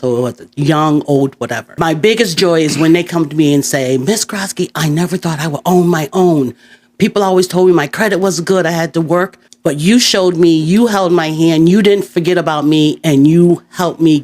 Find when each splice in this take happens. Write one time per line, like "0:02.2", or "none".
0:01.8
0:09.4
0:12.1